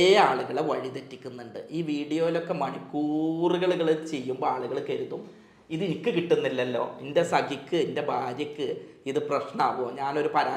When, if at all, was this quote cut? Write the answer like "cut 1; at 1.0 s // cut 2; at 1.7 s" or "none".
none